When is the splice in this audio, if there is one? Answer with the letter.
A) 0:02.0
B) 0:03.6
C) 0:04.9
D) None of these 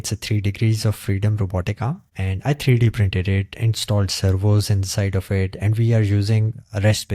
D